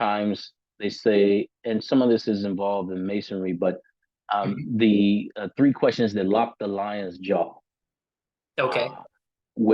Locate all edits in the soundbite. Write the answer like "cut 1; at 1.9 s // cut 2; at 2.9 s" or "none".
none